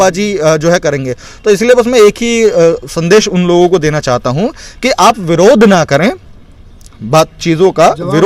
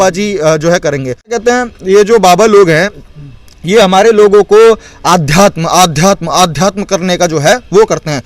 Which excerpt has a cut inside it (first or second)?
second